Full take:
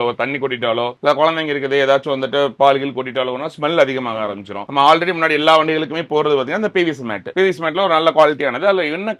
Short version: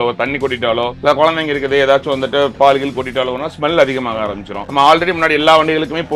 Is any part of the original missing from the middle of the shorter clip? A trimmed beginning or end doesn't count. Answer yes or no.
no